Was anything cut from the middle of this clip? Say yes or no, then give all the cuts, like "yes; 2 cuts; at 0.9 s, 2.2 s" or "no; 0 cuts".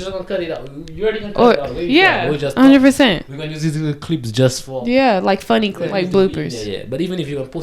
yes; 1 cut; at 5.8 s